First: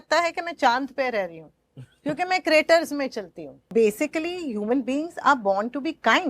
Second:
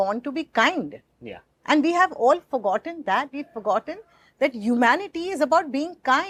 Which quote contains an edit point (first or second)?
first